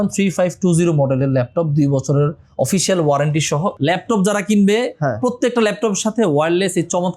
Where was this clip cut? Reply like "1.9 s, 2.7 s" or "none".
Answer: 3.8 s